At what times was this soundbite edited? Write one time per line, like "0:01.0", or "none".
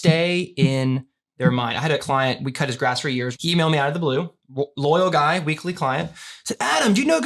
0:02.0
0:03.3